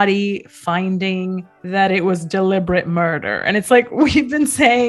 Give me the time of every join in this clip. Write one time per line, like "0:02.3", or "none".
none